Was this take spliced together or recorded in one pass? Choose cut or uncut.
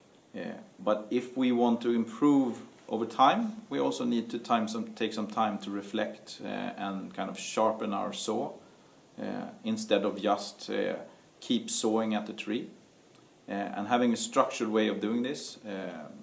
uncut